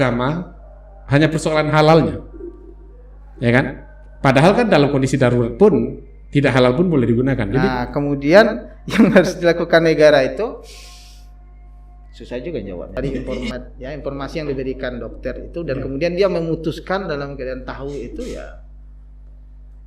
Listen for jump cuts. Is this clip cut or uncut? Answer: cut